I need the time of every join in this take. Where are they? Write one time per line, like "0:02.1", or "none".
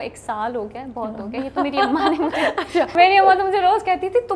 0:02.9